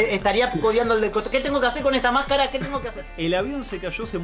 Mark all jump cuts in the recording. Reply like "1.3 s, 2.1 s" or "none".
2.8 s